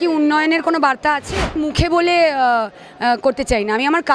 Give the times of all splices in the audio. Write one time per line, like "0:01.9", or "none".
0:01.6

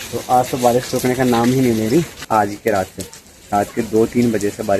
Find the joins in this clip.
0:02.2

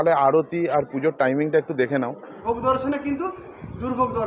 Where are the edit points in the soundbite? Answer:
0:02.3

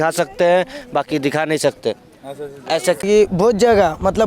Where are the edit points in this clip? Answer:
0:03.0

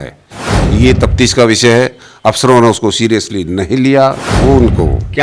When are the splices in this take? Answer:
0:04.3

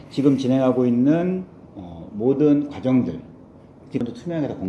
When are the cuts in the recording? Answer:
0:03.8

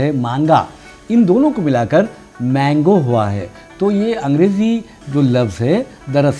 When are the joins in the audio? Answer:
none

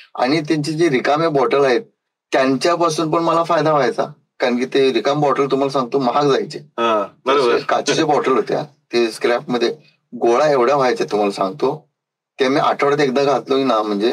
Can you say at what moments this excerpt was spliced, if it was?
none

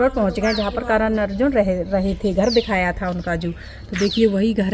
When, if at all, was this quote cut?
none

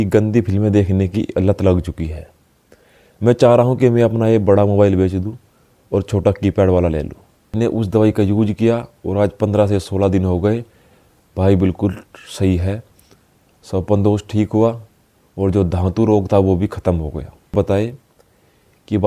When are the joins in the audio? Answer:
0:07.5
0:17.5

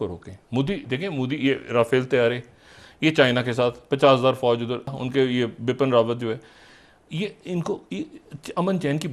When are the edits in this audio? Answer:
0:05.0

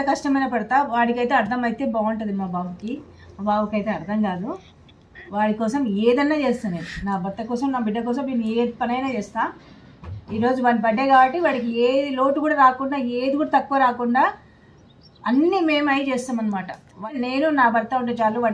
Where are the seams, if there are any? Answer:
0:17.1

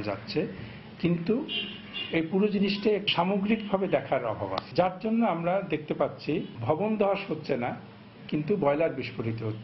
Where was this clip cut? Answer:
none

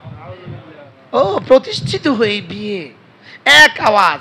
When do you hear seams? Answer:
0:01.0

